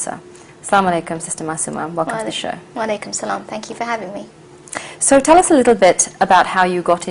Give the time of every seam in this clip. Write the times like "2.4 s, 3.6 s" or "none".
none